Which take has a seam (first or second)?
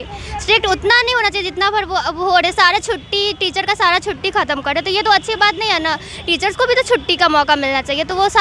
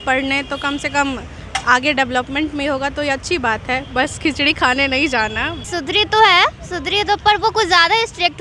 second